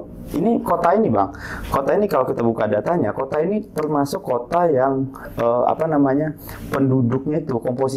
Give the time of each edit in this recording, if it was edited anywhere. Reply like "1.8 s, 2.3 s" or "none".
none

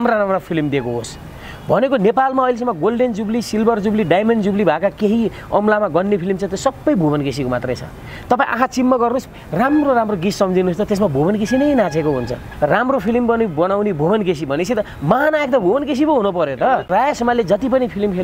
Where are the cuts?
12.4 s, 16.9 s

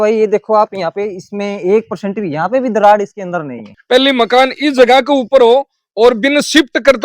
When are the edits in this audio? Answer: 3.7 s

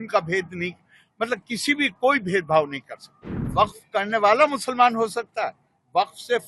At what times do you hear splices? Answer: 3.4 s

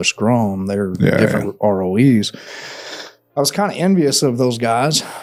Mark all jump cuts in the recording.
none

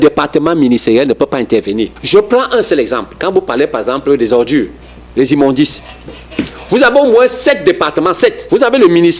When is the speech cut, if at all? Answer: 2.0 s, 8.4 s

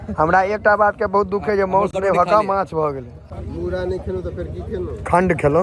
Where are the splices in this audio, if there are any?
3.2 s

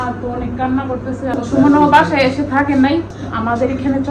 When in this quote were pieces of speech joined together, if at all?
1.4 s, 3.2 s

